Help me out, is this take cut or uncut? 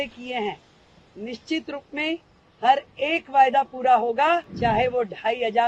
cut